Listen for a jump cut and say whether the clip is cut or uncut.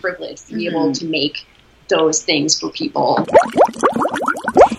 cut